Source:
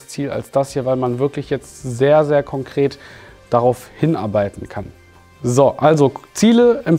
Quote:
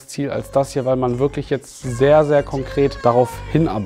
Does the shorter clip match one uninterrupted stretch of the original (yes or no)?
no